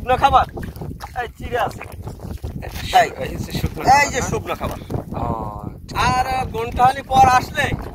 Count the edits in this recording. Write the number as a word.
two